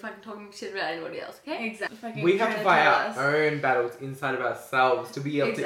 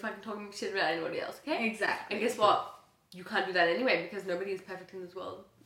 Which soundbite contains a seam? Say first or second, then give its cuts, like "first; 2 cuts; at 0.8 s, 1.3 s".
first; 1 cut; at 1.9 s